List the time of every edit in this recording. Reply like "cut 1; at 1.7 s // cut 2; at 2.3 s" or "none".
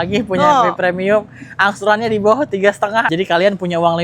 cut 1; at 3.1 s